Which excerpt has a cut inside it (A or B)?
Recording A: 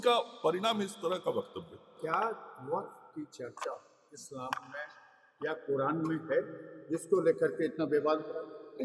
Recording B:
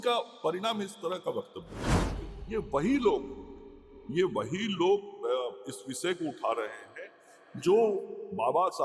B